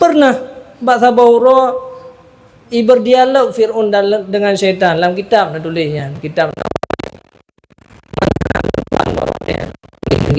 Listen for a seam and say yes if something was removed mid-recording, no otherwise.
no